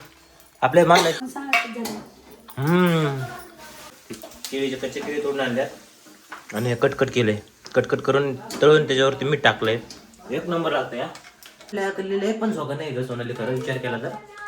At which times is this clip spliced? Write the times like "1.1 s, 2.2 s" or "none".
1.2 s, 4.0 s, 11.7 s